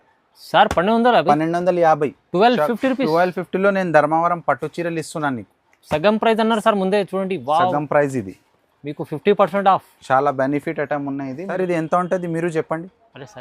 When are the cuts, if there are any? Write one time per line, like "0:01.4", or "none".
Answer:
0:11.6